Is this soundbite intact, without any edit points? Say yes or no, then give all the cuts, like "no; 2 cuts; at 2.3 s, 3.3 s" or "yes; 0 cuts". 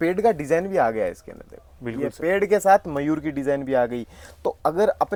yes; 0 cuts